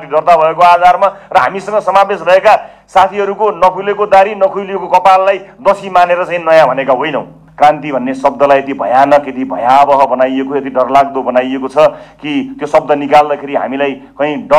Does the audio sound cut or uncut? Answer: cut